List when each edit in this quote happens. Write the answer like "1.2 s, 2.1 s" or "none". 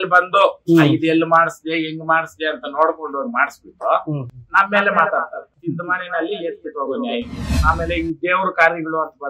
5.5 s, 7.4 s